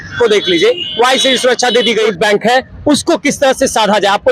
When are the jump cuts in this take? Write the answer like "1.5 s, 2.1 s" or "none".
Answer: 2.1 s